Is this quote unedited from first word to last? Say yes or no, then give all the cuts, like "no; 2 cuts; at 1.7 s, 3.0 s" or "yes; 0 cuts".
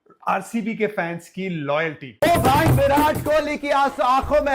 no; 1 cut; at 2.2 s